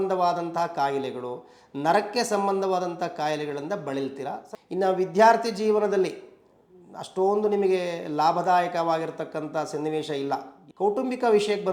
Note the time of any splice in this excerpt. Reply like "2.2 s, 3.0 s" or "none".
4.5 s, 10.6 s